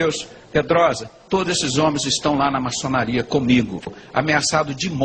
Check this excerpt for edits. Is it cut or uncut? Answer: cut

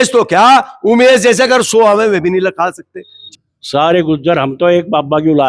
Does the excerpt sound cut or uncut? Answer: cut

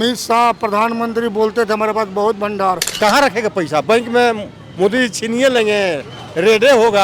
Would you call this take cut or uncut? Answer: cut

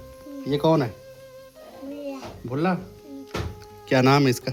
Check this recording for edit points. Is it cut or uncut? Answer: uncut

